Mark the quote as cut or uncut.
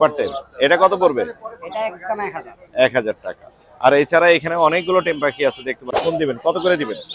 cut